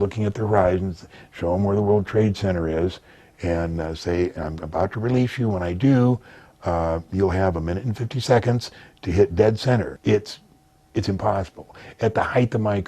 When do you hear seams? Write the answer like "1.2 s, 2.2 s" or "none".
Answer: 9.9 s